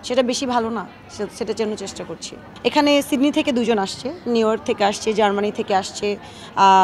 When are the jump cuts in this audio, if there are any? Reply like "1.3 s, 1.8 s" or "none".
none